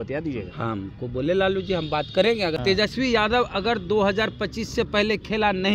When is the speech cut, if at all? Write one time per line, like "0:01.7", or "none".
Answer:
0:02.6